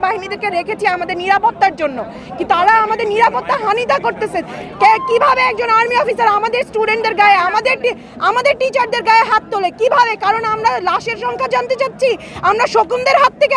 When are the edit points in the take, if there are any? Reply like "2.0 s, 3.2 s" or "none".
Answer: none